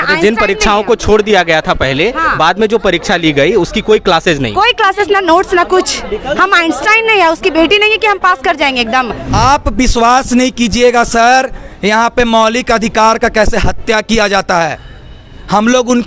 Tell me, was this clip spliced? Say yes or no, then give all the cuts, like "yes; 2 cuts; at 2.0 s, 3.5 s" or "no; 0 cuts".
yes; 1 cut; at 9.2 s